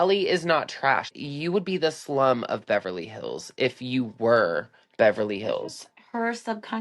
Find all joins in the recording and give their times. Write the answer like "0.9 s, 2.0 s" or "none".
1.1 s

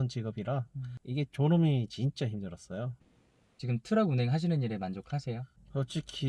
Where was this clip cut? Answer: 3.1 s

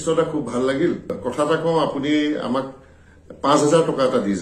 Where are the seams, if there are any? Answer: 1.2 s

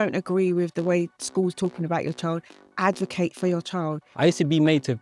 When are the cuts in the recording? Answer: 2.6 s, 4.0 s

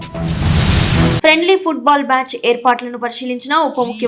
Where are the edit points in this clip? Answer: 1.2 s

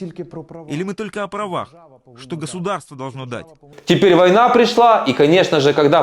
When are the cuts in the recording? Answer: 3.7 s

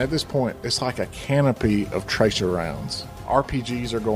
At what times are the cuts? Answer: 3.1 s

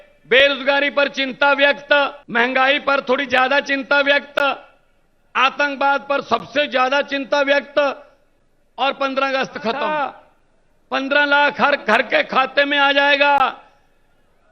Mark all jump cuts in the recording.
2.2 s, 9.9 s

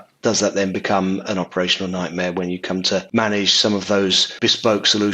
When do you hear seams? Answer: 3.1 s, 4.3 s

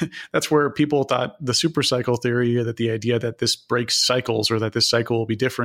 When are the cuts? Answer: none

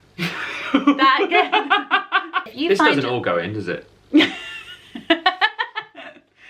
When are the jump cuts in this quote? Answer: 2.5 s

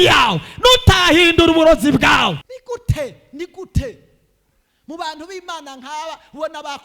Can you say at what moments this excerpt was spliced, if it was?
2.5 s

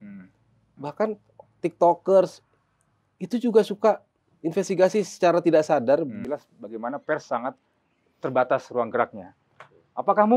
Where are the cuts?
6.2 s

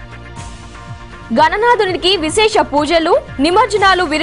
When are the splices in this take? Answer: 1.3 s

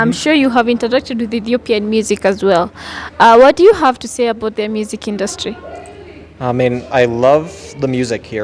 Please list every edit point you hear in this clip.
none

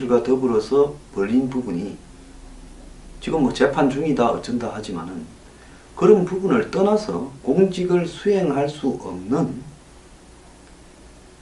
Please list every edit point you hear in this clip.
3.6 s

